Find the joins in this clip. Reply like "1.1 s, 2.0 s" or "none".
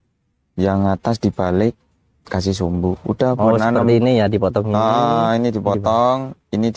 none